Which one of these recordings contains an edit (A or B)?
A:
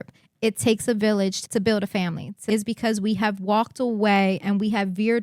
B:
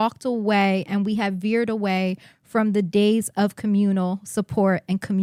A